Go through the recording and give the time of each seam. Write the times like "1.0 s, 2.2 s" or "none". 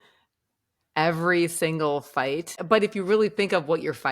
2.6 s

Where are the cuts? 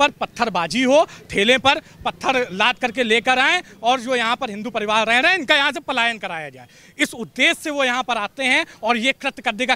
none

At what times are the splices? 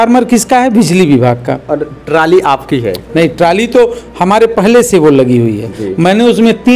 none

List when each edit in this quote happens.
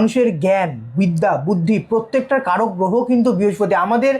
none

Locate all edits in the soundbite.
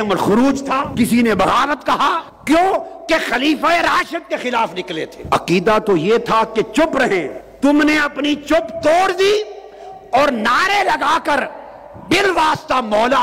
0.9 s, 2.3 s, 5.1 s, 7.4 s

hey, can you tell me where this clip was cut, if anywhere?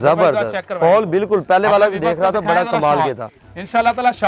none

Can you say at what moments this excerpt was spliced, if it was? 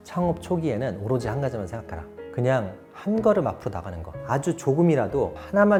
none

